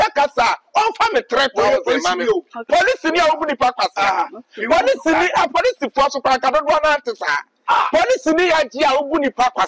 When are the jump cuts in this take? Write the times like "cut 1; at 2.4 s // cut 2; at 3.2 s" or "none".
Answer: none

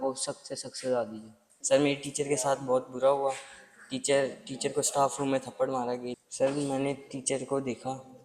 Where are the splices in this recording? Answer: none

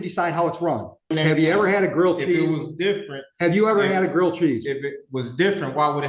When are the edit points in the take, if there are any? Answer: cut 1; at 1.1 s

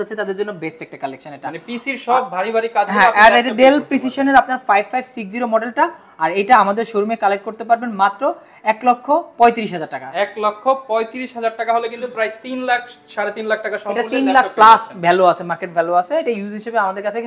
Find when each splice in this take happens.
none

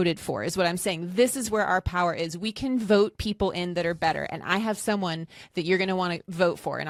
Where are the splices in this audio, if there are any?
none

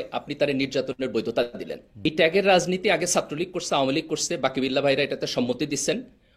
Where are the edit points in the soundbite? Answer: cut 1; at 2.0 s

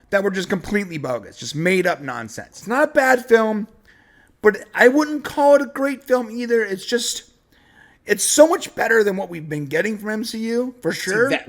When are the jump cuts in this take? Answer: cut 1; at 2.6 s

